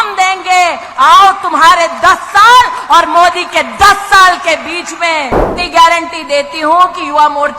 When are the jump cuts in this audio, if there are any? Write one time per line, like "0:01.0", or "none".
0:05.4